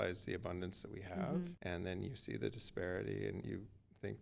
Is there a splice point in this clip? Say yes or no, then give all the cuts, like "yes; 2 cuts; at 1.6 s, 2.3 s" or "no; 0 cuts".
yes; 2 cuts; at 1.6 s, 3.4 s